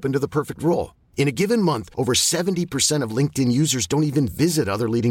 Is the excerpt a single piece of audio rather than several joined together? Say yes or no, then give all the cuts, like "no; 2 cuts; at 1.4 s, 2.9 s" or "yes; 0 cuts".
yes; 0 cuts